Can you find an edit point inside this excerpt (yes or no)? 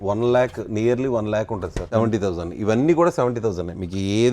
yes